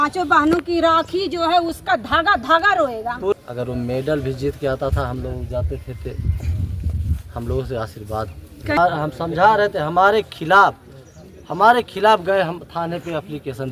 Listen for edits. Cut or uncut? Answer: cut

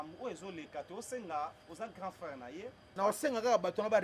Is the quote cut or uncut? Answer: cut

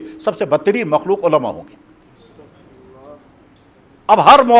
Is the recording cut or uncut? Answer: uncut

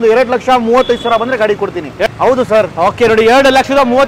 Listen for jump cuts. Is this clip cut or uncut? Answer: uncut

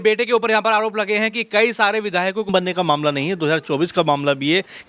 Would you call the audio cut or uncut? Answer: cut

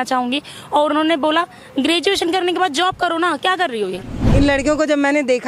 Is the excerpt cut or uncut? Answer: cut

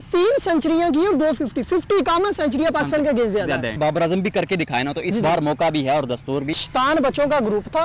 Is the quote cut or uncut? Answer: cut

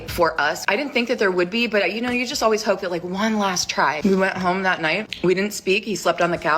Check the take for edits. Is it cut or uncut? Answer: cut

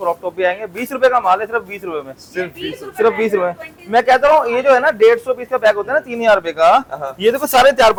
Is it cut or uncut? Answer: uncut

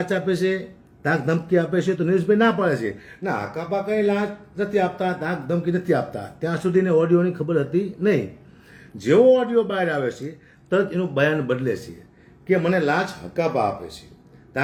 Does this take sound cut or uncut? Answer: uncut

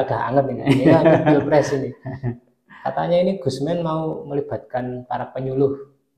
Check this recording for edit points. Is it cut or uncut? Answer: uncut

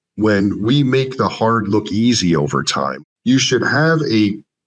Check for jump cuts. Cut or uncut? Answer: cut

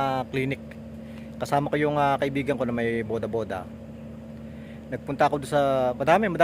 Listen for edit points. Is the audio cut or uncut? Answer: uncut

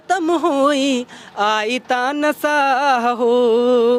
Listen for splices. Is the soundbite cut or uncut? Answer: uncut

